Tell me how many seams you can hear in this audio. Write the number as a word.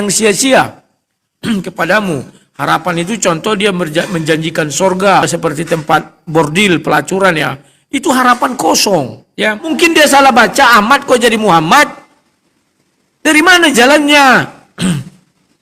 two